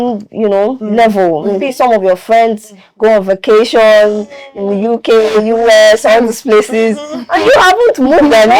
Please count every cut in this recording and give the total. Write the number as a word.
zero